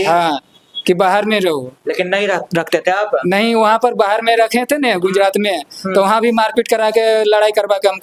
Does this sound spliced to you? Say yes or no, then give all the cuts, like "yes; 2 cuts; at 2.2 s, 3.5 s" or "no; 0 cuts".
no; 0 cuts